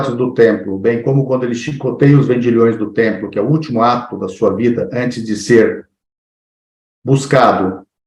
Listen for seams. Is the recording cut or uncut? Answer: uncut